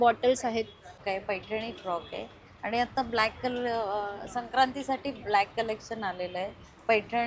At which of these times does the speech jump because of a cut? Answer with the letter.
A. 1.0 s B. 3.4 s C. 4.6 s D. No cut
A